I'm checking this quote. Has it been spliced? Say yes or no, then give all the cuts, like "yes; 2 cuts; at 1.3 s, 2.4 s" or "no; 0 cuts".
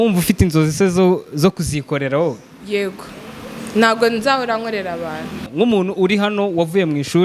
yes; 1 cut; at 5.4 s